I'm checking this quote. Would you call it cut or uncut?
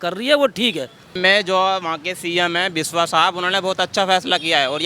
cut